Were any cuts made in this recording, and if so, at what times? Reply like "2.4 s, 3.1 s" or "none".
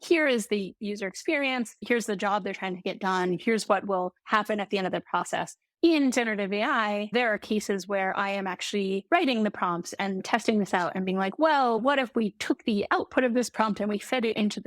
1.8 s